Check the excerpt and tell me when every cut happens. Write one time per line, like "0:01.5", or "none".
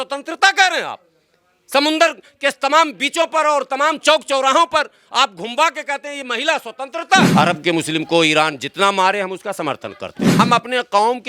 0:07.3
0:10.4